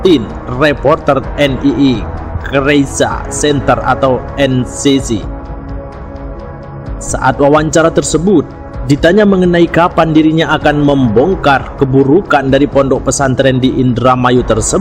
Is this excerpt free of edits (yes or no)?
yes